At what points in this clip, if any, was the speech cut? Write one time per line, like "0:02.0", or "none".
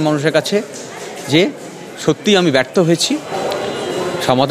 0:03.3